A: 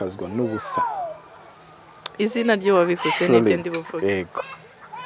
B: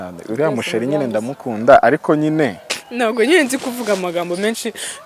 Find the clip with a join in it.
B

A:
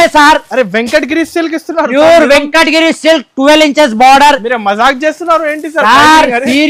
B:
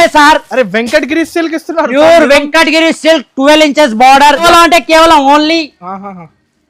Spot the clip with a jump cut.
B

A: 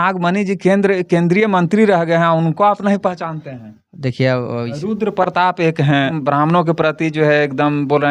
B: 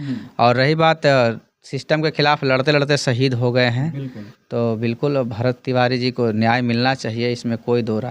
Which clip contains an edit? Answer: A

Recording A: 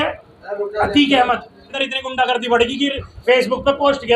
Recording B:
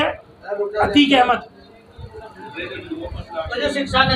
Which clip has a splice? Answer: A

